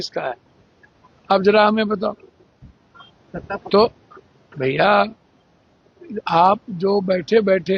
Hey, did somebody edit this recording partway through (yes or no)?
no